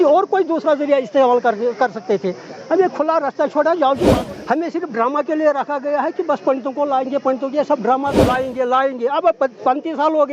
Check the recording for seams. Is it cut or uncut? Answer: cut